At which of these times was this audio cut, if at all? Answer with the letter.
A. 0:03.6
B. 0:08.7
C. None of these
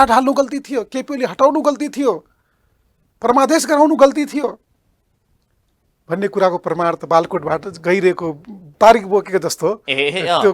B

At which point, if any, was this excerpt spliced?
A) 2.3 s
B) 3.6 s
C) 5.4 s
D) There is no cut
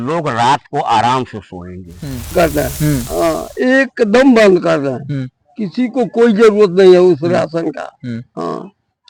A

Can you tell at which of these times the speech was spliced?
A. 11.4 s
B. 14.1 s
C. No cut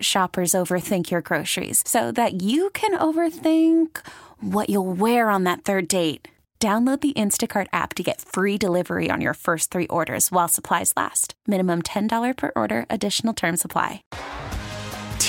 B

